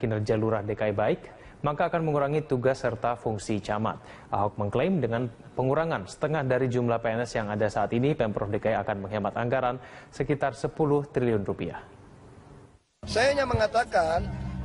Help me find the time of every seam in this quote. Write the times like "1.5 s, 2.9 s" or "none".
7.9 s